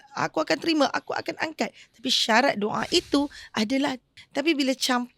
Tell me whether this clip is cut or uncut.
cut